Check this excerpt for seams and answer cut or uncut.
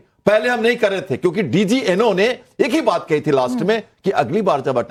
uncut